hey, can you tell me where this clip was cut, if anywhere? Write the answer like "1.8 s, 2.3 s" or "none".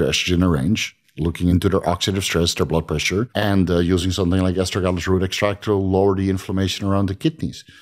1.5 s, 3.3 s

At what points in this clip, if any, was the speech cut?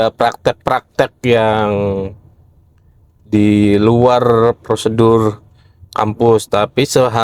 none

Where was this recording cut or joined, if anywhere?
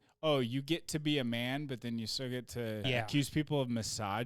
2.8 s

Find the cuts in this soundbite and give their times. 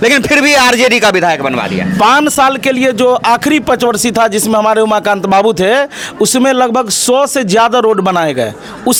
none

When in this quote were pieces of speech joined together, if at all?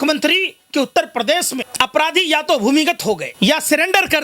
1.7 s, 3.3 s

